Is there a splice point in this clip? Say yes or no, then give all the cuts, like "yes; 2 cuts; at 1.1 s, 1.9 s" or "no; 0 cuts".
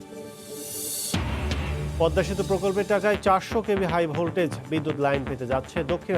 no; 0 cuts